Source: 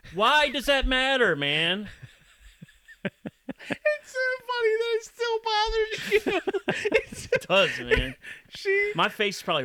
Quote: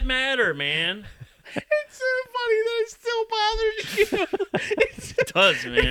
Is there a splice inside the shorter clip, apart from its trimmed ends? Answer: yes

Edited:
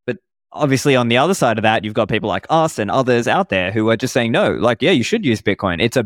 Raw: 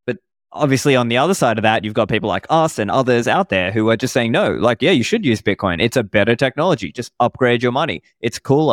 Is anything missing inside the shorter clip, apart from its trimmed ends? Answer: no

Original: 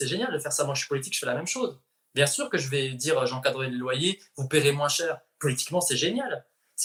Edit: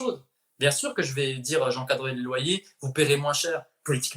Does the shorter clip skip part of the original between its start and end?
no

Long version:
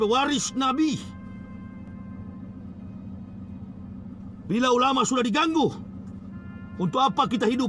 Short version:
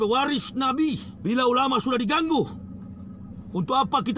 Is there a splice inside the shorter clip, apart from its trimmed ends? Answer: yes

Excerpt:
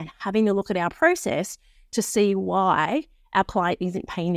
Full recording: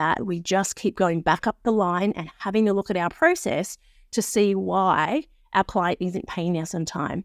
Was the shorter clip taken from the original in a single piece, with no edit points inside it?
yes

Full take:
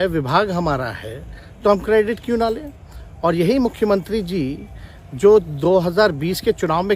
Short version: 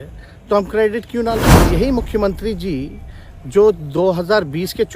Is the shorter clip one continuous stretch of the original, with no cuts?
no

